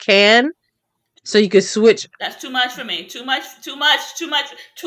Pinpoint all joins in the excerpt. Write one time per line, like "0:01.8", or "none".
none